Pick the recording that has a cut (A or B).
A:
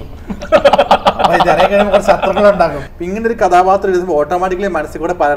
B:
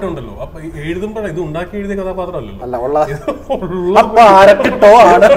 A